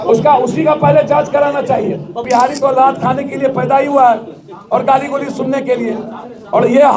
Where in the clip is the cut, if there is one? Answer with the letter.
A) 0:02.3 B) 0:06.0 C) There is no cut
A